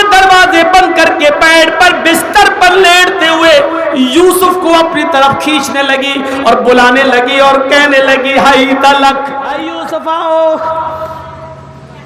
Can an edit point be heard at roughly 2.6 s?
no; 1 cut; at 9.7 s

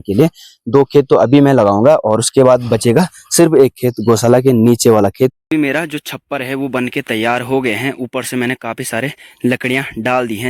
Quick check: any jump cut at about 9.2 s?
no; 1 cut; at 5.4 s

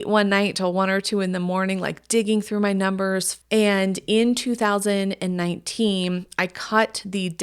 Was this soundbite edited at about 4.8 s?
no; 1 cut; at 3.3 s

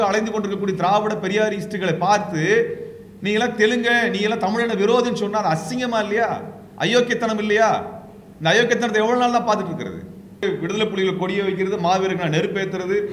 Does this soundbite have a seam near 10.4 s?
yes; 1 cut; at 10.4 s

